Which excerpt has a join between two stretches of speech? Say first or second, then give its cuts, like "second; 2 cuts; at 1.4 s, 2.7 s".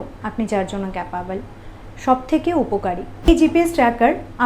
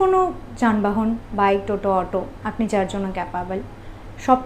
first; 1 cut; at 3.3 s